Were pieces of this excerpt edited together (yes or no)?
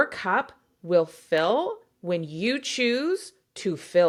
no